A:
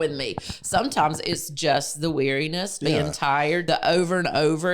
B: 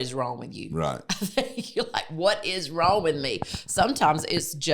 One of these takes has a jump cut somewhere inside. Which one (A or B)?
A